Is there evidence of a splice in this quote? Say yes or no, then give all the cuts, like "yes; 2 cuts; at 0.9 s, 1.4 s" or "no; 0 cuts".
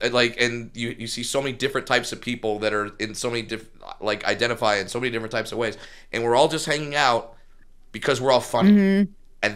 no; 0 cuts